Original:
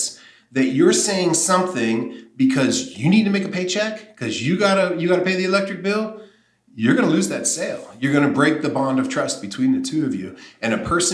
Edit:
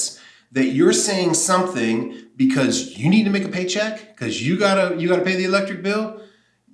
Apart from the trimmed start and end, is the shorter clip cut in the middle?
no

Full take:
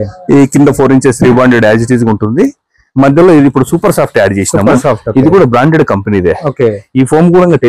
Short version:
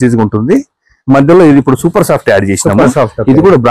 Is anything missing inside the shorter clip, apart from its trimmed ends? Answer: no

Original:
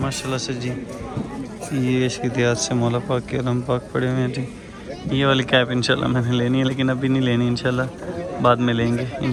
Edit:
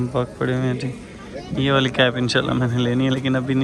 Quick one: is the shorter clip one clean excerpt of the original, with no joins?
yes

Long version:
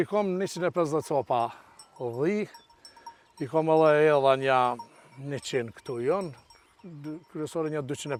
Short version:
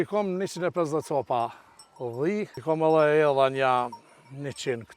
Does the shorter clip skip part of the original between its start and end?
yes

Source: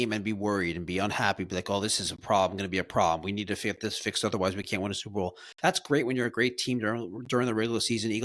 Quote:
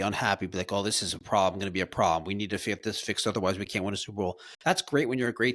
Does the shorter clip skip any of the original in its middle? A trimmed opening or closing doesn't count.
no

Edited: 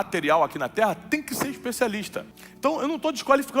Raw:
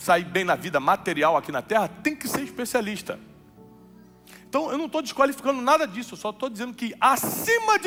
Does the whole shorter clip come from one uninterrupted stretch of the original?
no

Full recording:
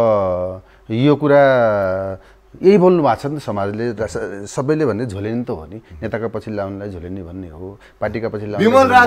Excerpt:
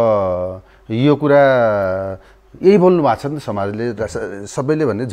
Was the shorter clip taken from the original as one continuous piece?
yes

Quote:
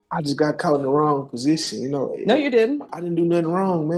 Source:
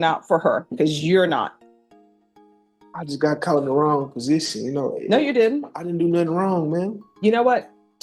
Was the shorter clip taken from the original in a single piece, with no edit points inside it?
yes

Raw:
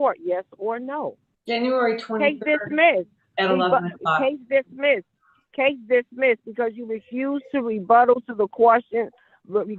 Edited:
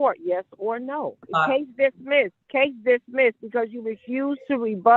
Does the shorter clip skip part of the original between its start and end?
yes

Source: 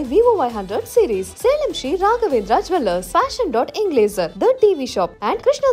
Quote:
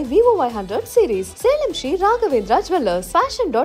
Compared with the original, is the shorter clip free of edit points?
yes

